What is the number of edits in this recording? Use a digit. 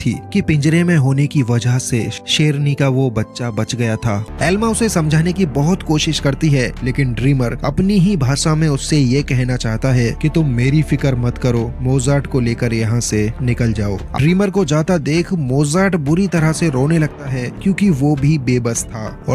2